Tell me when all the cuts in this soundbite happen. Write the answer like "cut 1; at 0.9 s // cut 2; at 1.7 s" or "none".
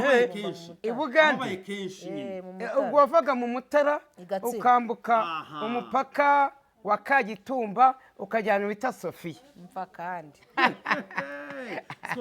cut 1; at 10.4 s